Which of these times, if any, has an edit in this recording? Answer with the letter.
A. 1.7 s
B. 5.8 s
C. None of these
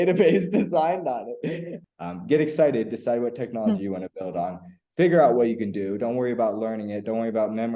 A